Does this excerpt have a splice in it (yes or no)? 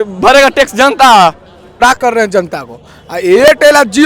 yes